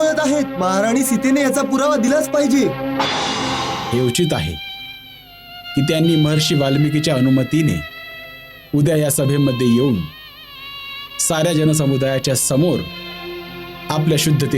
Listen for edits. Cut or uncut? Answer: cut